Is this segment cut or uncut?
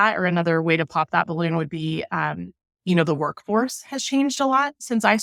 uncut